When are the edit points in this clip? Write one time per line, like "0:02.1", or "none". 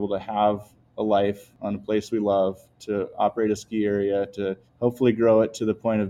0:01.5
0:04.6

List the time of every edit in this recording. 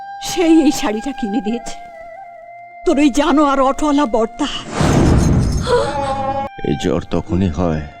0:06.5

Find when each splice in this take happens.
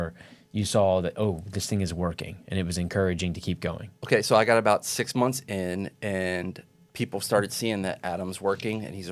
0:03.9

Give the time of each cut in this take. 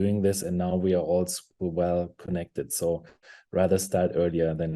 none

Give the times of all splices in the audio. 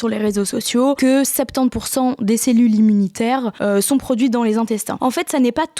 0:01.0
0:03.5
0:04.9

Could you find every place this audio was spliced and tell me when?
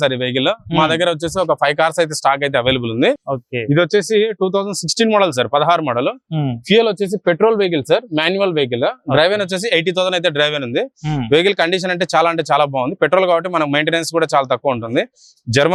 none

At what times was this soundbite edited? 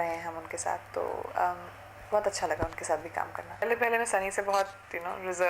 0:03.6

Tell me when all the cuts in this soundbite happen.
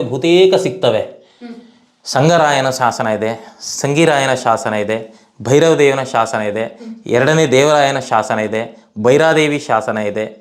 none

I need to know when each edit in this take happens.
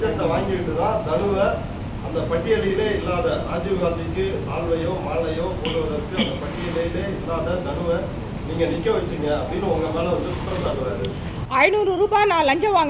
none

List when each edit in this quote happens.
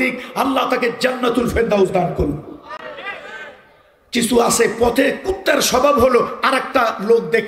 none

